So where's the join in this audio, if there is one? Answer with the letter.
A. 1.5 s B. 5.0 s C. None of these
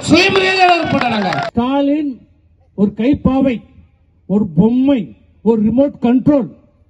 A